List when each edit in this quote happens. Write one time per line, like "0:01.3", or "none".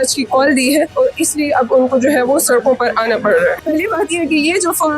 0:00.9
0:03.6